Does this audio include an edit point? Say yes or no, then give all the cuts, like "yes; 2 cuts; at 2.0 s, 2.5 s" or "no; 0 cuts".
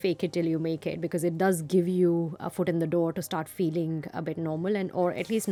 no; 0 cuts